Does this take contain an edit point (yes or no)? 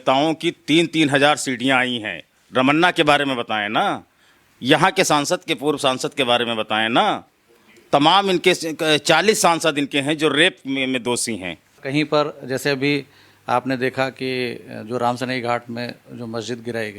yes